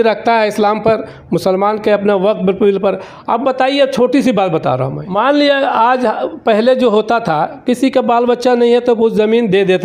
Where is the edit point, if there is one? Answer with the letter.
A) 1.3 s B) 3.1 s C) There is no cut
C